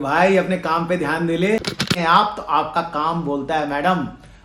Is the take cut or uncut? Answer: cut